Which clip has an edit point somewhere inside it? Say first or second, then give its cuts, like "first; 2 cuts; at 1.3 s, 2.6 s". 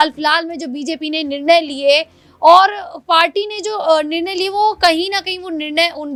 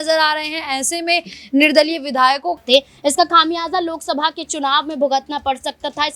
second; 1 cut; at 2.6 s